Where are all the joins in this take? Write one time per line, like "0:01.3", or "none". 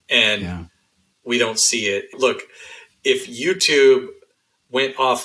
0:02.1